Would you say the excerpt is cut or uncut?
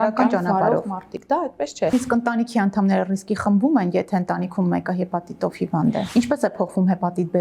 cut